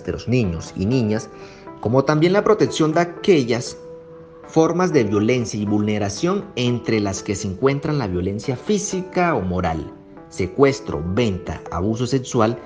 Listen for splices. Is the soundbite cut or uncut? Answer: uncut